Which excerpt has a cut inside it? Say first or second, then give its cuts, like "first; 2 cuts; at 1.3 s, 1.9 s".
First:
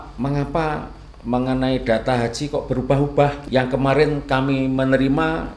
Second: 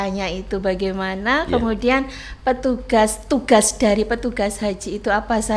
first; 1 cut; at 3.4 s